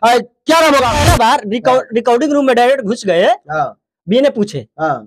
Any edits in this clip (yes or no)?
yes